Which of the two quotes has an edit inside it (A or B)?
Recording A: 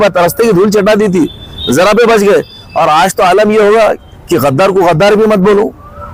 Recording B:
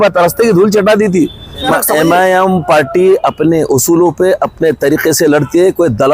B